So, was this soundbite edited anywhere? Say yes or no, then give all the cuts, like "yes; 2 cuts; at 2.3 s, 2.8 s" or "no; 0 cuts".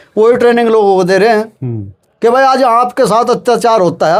no; 0 cuts